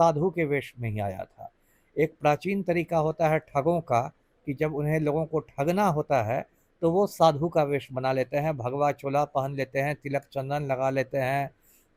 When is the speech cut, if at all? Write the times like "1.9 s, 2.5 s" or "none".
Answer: none